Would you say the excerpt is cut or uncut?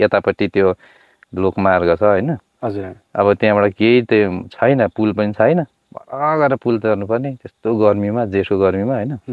uncut